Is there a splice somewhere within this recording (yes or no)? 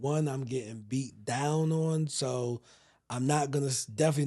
no